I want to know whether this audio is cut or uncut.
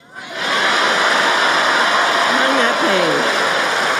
uncut